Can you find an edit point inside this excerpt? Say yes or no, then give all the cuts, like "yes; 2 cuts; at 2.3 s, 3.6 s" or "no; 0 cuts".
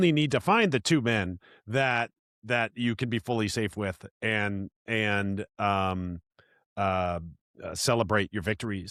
no; 0 cuts